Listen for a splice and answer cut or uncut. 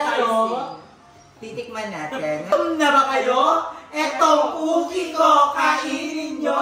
cut